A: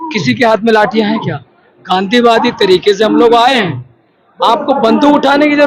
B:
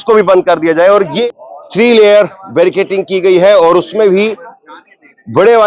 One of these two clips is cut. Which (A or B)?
B